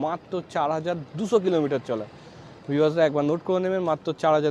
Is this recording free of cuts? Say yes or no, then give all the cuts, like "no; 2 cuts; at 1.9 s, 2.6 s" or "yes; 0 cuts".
yes; 0 cuts